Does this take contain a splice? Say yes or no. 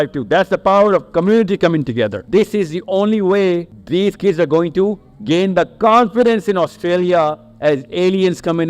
yes